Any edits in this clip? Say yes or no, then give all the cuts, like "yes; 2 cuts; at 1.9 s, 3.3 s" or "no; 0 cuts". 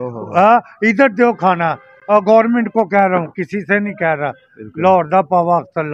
no; 0 cuts